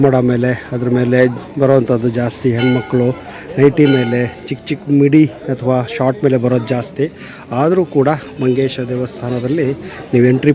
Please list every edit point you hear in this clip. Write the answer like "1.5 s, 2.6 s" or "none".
none